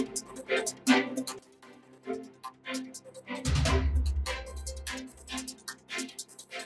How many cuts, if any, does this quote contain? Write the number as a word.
one